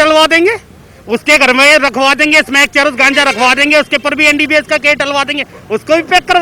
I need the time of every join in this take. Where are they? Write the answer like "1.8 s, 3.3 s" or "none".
none